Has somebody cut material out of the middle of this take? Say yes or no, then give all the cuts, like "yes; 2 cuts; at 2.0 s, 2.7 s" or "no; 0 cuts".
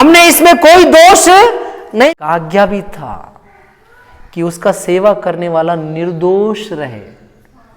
yes; 1 cut; at 2.1 s